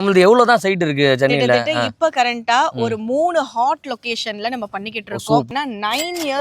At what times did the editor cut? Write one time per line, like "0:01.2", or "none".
0:05.5